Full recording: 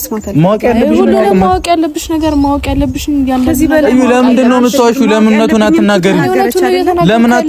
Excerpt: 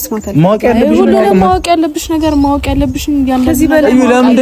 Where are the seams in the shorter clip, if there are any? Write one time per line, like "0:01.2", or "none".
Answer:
none